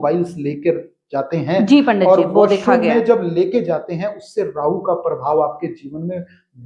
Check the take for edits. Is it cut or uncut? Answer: uncut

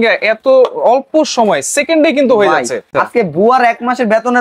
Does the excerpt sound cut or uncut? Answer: cut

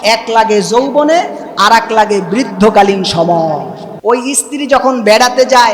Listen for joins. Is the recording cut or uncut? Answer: cut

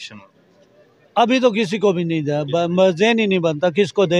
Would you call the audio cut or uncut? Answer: uncut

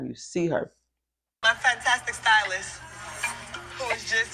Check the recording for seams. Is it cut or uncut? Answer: uncut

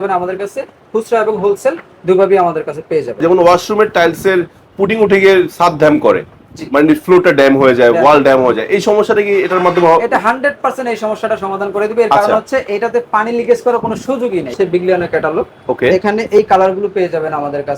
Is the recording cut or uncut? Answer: cut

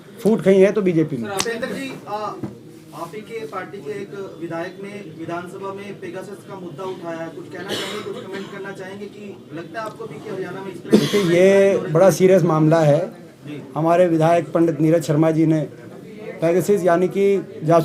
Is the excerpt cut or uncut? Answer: uncut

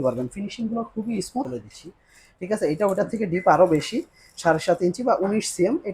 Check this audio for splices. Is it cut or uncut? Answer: cut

